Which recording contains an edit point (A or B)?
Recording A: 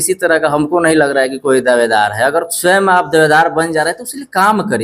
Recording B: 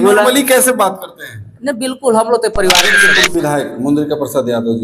B